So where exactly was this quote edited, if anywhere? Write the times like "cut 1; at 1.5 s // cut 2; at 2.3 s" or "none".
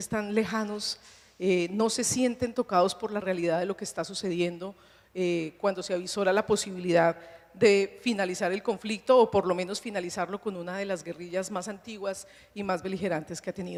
none